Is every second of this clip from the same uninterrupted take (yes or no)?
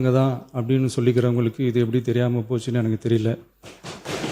yes